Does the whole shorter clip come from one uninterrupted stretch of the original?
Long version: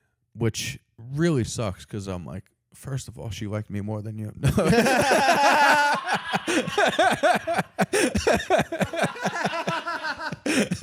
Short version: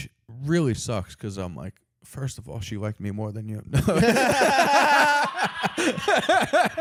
yes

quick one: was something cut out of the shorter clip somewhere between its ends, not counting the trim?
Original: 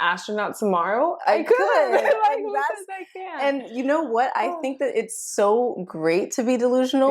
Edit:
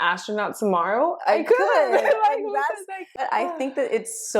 yes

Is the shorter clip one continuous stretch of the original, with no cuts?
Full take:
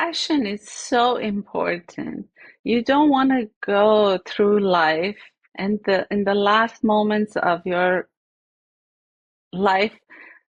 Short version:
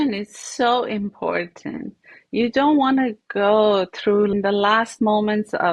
no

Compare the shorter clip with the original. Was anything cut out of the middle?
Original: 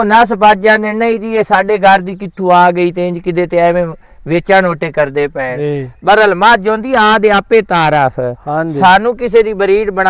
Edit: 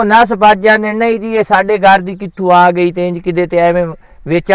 no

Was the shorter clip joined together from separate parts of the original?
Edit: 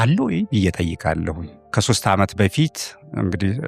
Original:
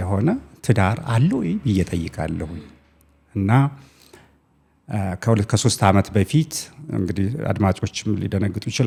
yes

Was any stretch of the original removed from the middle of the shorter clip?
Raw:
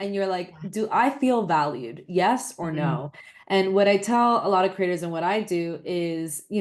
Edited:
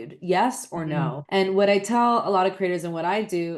yes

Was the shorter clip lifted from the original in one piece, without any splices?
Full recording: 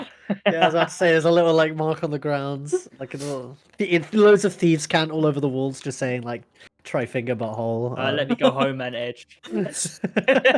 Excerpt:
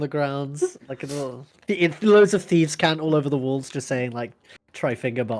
yes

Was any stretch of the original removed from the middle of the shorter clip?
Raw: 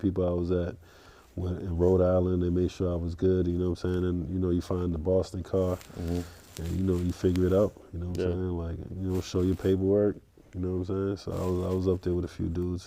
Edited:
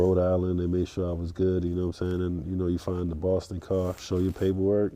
yes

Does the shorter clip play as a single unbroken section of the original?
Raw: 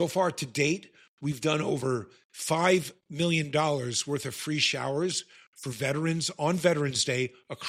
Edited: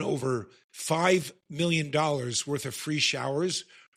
yes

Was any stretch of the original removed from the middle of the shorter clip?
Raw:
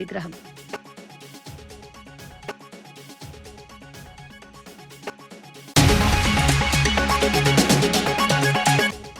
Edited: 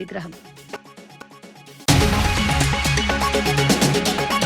yes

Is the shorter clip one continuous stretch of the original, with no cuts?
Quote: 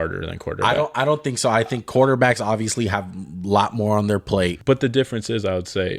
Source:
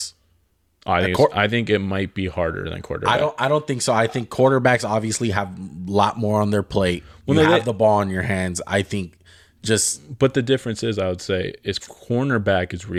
no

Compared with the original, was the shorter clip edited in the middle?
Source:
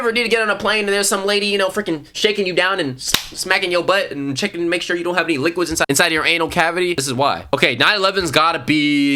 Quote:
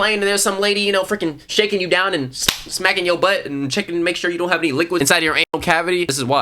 yes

